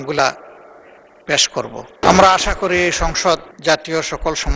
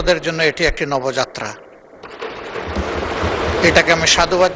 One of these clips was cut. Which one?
first; 2 cuts; at 2.0 s, 3.5 s

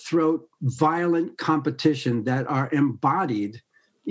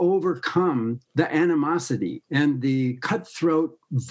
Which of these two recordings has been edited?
second; 2 cuts; at 1.0 s, 2.2 s

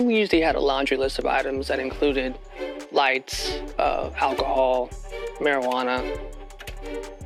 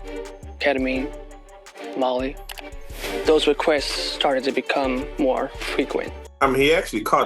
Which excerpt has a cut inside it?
second; 1 cut; at 6.2 s

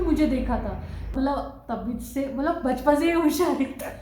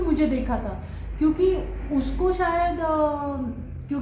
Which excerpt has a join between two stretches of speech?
first; 1 cut; at 1.1 s

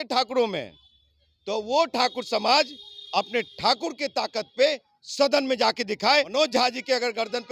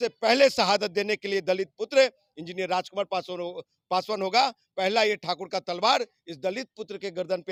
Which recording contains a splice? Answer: first; 1 cut; at 6.3 s

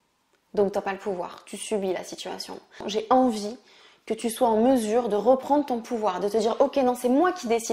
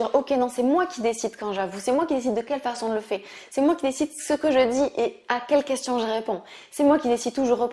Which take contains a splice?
first; 1 cut; at 2.9 s

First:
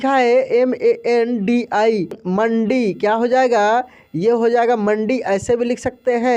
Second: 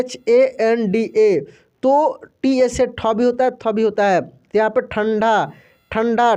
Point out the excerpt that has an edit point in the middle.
first; 1 cut; at 2.2 s

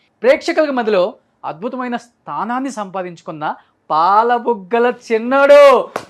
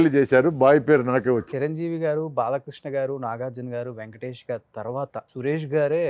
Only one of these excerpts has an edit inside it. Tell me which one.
second; 2 cuts; at 1.4 s, 5.3 s

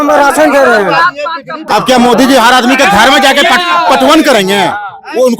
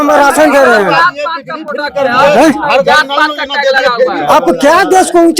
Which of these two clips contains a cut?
first; 1 cut; at 1.5 s

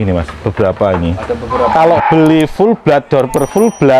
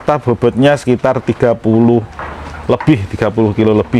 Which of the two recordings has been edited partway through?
first; 1 cut; at 1.6 s

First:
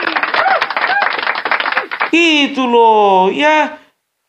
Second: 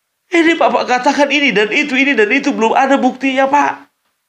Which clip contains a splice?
first; 1 cut; at 1.4 s

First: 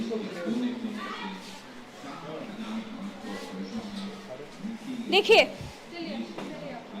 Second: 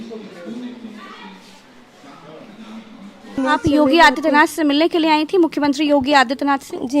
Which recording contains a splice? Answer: second; 1 cut; at 3.4 s

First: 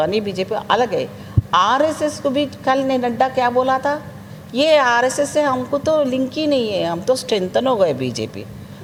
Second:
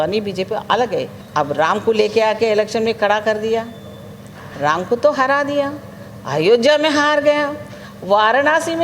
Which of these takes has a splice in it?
second; 1 cut; at 1.2 s

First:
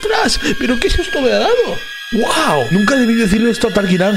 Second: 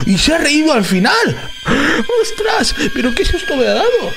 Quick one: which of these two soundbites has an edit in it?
second; 1 cut; at 1.4 s

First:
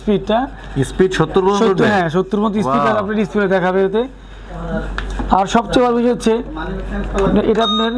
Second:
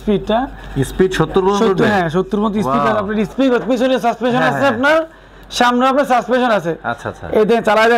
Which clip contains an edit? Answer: second; 1 cut; at 3.3 s

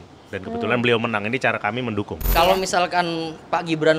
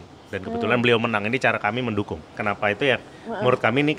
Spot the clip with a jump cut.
first; 1 cut; at 2.3 s

